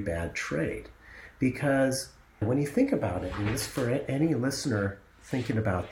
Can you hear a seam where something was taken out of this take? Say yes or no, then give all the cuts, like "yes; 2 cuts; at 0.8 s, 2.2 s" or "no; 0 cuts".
yes; 1 cut; at 2.4 s